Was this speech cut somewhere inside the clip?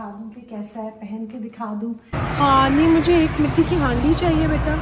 yes; 1 cut; at 2.1 s

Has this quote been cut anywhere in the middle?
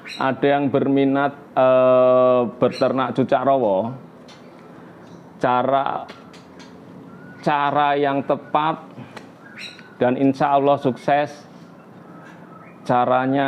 no; 0 cuts

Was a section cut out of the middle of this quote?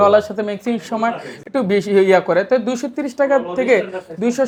no; 0 cuts

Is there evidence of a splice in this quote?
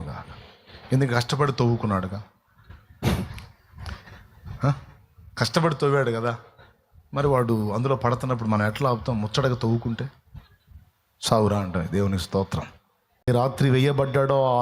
yes; 1 cut; at 13.3 s

